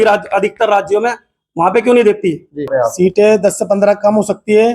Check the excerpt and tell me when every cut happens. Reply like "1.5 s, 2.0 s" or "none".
2.7 s